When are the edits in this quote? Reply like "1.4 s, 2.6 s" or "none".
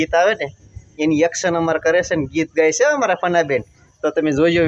none